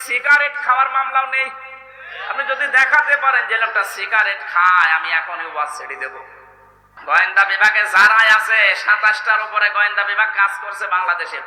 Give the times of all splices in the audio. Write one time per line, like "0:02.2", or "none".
0:06.9